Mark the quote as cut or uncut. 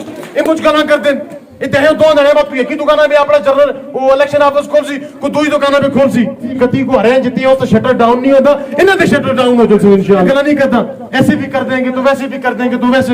cut